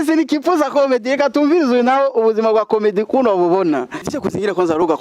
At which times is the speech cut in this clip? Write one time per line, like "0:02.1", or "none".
0:04.0